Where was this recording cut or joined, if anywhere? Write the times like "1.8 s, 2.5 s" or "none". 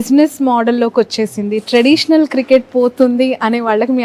none

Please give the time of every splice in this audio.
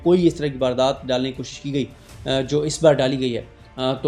none

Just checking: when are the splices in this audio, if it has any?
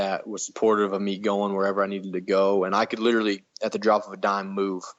none

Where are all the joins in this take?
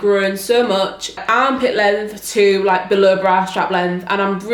1.1 s

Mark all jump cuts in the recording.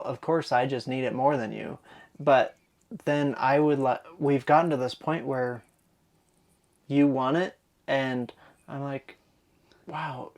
none

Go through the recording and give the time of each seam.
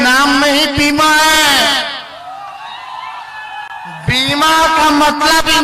none

